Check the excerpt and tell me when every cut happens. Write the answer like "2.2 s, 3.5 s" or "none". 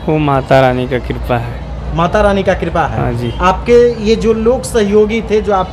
none